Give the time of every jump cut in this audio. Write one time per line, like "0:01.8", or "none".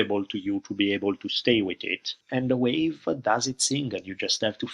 0:02.1